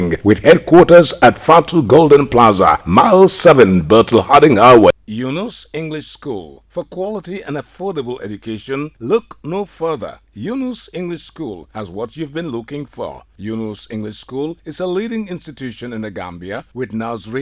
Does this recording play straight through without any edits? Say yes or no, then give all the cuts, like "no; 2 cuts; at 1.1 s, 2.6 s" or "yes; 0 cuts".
no; 1 cut; at 4.9 s